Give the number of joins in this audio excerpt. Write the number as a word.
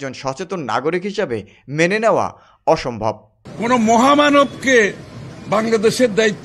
one